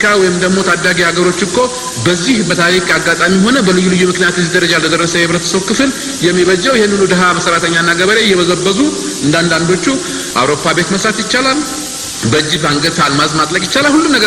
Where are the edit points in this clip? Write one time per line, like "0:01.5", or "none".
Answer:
none